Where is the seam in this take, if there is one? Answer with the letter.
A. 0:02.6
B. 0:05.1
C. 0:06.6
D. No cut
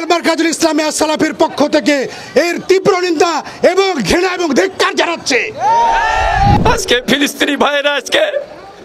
C